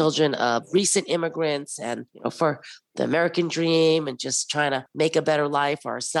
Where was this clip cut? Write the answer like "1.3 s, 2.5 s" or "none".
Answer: none